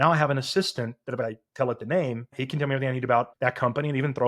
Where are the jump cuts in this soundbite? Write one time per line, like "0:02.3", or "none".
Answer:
0:01.2
0:02.4
0:03.3